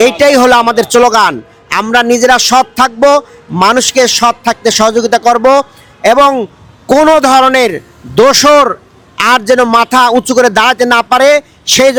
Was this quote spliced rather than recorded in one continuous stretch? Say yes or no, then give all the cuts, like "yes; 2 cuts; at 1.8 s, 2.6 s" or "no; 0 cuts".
no; 0 cuts